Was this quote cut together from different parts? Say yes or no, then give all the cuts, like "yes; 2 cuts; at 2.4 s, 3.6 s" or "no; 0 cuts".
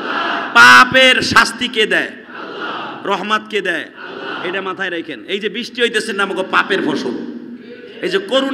no; 0 cuts